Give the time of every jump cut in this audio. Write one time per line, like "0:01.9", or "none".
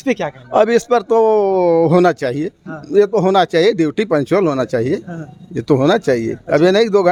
none

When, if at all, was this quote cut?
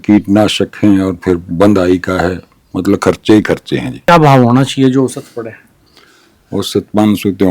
0:04.1

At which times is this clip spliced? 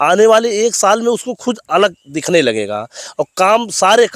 none

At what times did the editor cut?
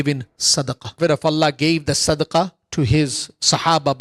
0:01.0

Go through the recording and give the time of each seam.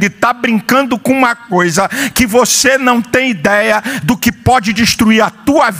0:03.9

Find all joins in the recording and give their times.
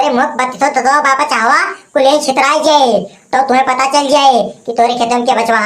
none

